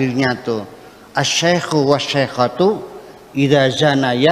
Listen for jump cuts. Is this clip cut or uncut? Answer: uncut